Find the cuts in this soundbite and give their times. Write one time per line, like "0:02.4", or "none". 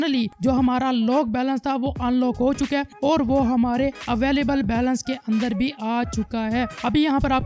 none